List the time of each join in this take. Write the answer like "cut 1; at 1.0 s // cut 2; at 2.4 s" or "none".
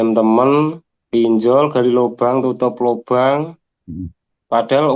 none